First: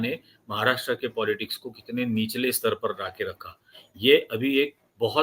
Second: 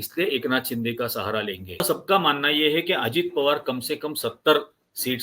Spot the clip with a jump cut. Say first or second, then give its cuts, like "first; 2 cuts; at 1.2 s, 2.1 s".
second; 1 cut; at 1.8 s